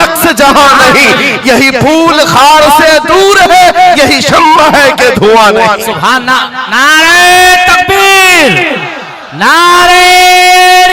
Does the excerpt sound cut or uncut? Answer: uncut